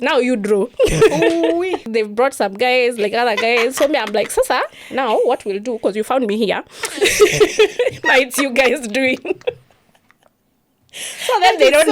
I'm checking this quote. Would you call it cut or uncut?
cut